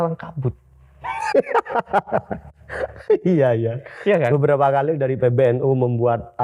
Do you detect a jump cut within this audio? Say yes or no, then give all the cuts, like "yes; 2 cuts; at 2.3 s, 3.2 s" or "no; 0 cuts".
no; 0 cuts